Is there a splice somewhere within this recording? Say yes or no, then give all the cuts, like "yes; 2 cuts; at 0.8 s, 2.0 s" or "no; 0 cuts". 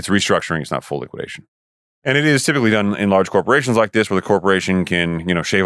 yes; 1 cut; at 1.4 s